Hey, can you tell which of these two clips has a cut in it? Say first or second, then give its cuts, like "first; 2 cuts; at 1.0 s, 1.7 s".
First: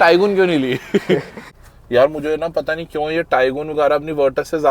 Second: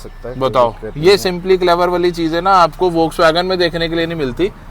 first; 1 cut; at 1.4 s